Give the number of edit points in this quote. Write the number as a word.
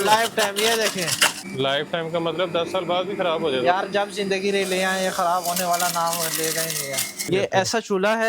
two